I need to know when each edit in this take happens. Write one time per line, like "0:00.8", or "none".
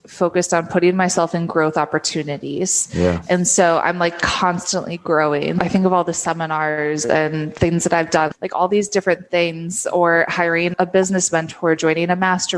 0:05.6
0:08.3
0:10.7